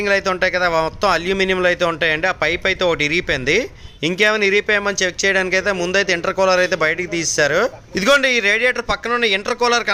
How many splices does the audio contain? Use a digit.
0